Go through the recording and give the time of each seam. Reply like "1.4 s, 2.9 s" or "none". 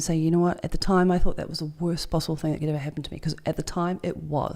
none